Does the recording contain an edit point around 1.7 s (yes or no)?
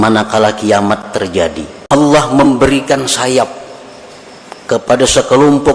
yes